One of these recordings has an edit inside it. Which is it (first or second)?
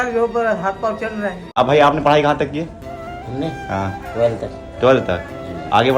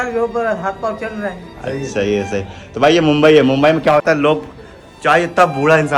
first